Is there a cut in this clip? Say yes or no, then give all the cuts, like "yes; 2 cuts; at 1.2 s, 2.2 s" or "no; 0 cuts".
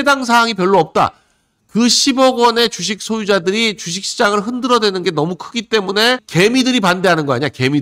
yes; 1 cut; at 6.2 s